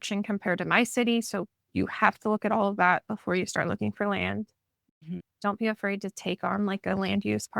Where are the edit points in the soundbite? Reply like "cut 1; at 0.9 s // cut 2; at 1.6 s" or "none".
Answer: cut 1; at 5.3 s

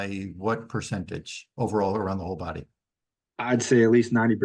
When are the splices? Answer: none

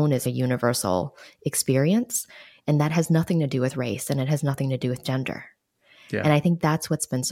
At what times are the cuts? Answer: none

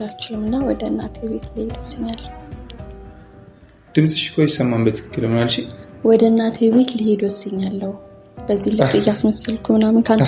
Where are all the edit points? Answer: none

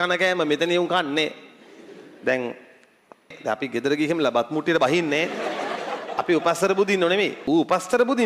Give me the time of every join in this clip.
cut 1; at 3.4 s // cut 2; at 7.4 s

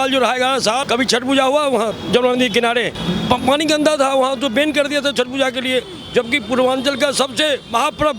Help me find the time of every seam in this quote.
cut 1; at 0.8 s // cut 2; at 2.0 s // cut 3; at 3.0 s

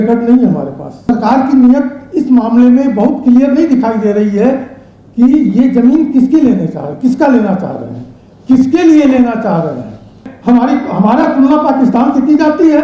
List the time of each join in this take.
cut 1; at 1.1 s // cut 2; at 10.3 s

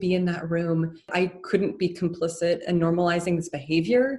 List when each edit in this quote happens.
cut 1; at 1.1 s

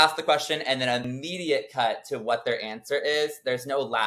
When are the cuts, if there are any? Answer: cut 1; at 1.1 s

